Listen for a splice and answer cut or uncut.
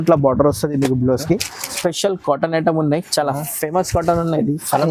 cut